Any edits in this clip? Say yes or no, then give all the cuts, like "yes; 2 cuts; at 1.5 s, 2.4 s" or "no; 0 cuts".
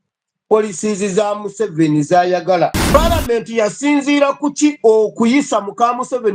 yes; 1 cut; at 2.8 s